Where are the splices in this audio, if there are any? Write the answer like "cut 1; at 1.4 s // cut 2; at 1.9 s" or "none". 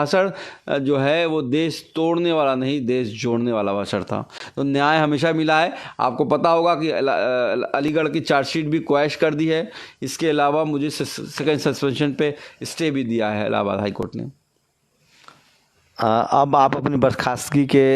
none